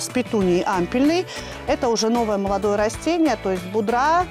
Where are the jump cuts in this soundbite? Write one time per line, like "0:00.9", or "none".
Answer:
0:01.4